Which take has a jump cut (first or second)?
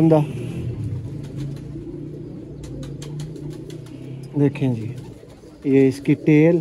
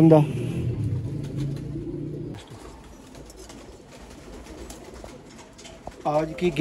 second